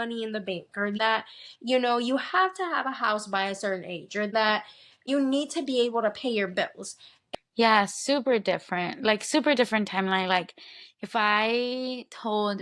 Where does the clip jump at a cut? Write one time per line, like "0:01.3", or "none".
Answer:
0:07.1